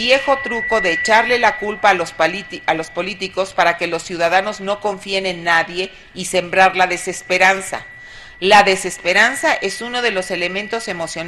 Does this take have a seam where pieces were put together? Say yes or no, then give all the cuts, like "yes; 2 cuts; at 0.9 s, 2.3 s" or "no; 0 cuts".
no; 0 cuts